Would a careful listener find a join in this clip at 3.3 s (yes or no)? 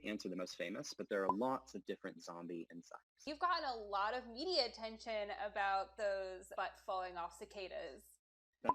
yes